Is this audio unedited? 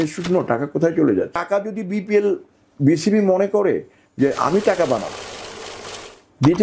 no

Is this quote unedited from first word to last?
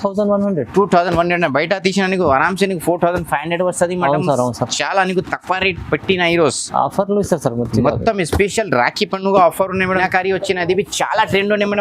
no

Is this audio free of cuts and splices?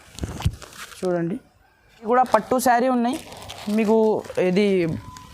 no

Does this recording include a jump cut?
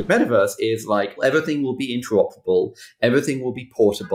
yes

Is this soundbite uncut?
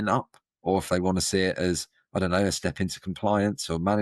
yes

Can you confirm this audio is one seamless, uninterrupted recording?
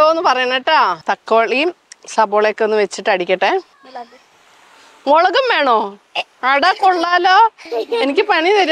no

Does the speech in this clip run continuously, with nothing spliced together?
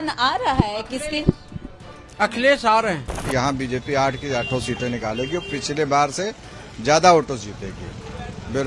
no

